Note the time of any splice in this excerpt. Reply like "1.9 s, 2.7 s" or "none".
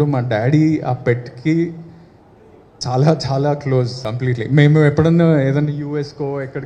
4.0 s